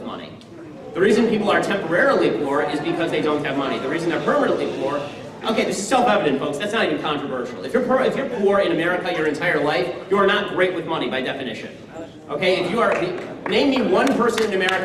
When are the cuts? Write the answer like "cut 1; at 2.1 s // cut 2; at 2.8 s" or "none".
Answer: cut 1; at 3.3 s